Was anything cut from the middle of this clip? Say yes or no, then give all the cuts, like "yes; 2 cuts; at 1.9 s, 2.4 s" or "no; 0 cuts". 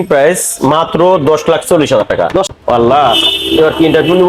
yes; 1 cut; at 2.5 s